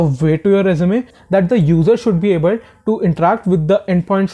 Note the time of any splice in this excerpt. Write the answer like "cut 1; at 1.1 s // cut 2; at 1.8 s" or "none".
cut 1; at 1.1 s